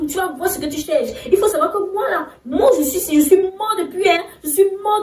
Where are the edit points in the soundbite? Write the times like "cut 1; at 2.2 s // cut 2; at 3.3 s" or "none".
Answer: none